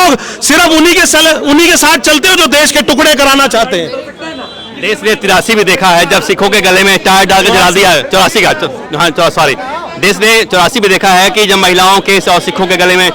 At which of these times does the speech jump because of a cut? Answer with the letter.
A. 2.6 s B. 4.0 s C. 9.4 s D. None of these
D